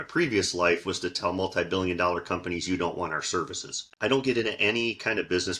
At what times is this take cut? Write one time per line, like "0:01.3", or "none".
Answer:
0:03.8